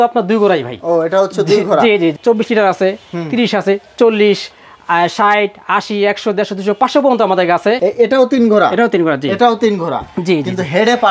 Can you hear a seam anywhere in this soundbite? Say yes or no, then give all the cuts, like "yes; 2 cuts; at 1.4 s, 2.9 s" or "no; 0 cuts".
yes; 2 cuts; at 2.2 s, 7.8 s